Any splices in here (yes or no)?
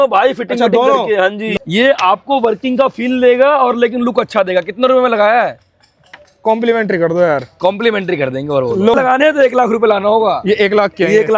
yes